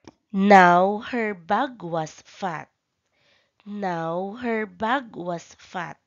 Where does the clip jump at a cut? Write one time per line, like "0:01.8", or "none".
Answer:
0:04.6